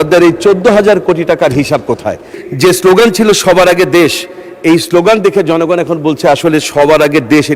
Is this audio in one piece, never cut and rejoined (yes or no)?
no